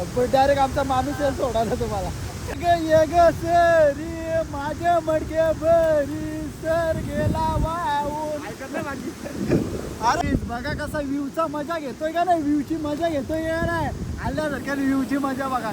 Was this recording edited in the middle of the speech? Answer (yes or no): yes